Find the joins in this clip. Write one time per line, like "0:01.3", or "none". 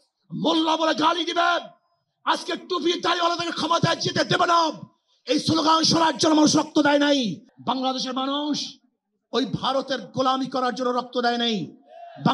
0:07.5